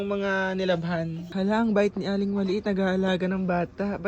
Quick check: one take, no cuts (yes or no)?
no